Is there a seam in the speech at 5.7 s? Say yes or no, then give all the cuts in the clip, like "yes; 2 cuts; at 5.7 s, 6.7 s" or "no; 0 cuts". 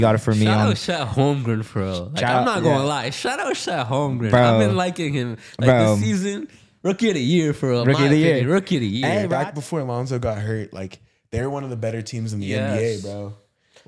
no; 1 cut; at 9.3 s